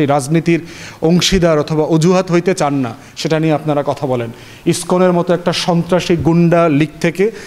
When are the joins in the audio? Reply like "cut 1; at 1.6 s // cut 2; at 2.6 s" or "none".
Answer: none